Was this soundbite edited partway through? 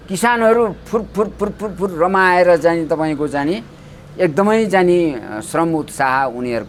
no; 0 cuts

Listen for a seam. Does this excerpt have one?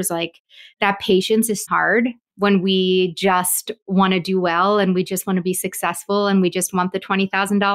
yes; 1 cut; at 1.9 s

